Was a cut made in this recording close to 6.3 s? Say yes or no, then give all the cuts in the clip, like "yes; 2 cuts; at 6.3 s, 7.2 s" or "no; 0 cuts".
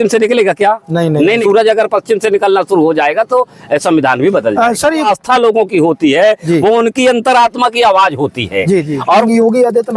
no; 3 cuts; at 1.4 s, 5.1 s, 9.2 s